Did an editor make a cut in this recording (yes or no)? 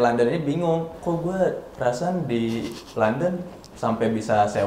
yes